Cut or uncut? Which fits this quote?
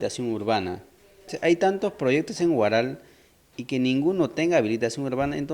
cut